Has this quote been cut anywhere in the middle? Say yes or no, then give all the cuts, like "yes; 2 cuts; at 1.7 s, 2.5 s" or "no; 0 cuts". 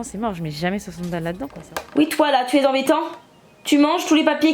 yes; 1 cut; at 1.6 s